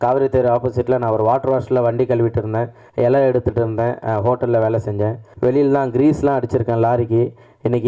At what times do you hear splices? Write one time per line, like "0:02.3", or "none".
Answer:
0:02.8
0:05.2